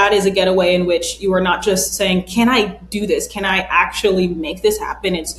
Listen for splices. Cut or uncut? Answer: uncut